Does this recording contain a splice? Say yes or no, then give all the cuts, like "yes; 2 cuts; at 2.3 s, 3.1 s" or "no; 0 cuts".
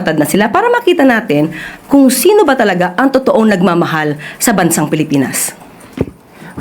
no; 0 cuts